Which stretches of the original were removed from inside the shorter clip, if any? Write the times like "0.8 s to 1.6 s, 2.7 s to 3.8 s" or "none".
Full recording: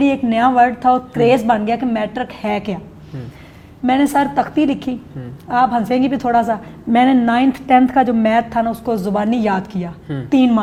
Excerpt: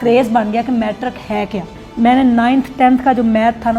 3.0 s to 6.7 s